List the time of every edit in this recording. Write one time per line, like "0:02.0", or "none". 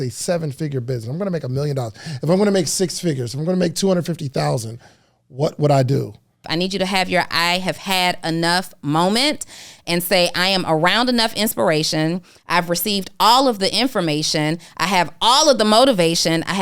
0:06.5